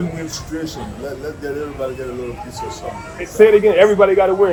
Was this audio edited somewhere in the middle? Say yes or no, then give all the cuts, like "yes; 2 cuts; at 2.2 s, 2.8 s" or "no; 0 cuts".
no; 0 cuts